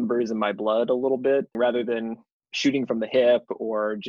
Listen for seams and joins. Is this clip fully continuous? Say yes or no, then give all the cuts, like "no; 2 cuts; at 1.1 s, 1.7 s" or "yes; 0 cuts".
no; 1 cut; at 1.5 s